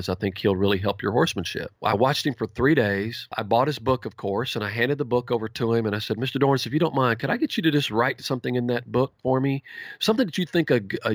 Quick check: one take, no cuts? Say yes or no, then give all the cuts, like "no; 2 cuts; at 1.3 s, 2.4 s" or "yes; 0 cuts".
no; 2 cuts; at 1.6 s, 3.3 s